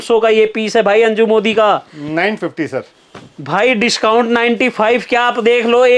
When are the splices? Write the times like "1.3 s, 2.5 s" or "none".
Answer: none